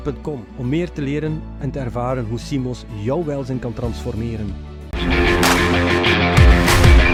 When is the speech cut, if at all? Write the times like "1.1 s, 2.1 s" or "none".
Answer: none